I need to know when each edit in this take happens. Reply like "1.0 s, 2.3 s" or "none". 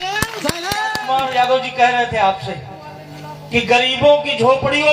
1.0 s